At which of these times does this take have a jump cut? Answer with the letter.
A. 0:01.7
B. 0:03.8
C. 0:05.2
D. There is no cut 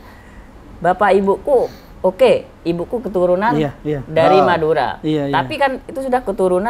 D